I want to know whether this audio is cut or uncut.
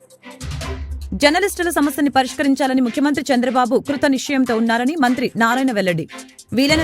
uncut